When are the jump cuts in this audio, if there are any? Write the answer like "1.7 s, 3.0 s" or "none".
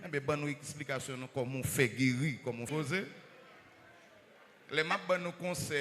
2.7 s